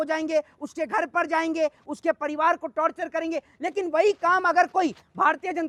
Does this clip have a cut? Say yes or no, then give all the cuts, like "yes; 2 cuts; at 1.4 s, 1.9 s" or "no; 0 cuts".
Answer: no; 0 cuts